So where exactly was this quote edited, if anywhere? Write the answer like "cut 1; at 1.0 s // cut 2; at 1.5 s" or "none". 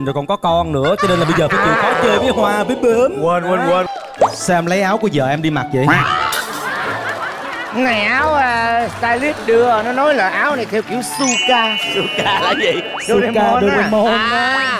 cut 1; at 3.9 s